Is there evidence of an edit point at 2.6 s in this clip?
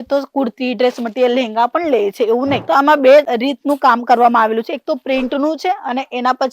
yes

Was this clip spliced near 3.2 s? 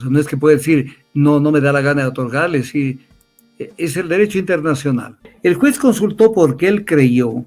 no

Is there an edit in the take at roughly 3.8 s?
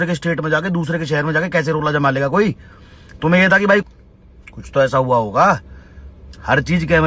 yes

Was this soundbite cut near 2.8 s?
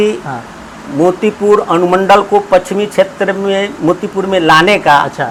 no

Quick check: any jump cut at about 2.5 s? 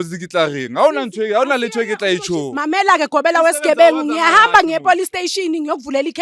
yes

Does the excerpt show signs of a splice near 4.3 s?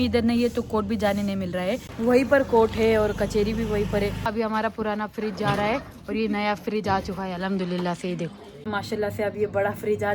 yes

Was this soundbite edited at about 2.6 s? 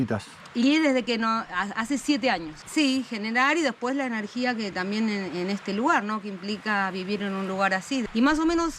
yes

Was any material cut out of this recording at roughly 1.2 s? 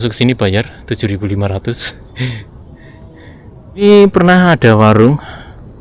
no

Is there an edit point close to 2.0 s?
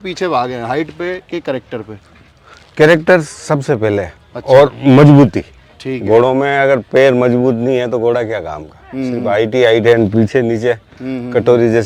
no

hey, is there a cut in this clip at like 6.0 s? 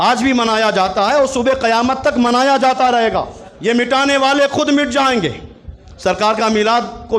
no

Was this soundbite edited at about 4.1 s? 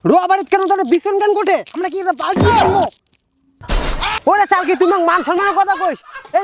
yes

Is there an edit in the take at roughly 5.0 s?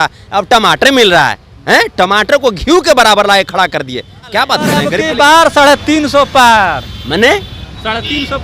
yes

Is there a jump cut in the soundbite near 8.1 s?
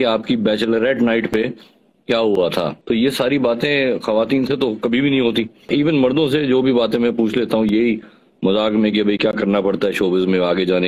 no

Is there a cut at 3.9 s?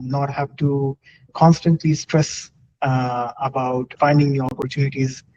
yes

